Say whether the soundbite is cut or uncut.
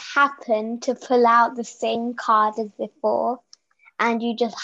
uncut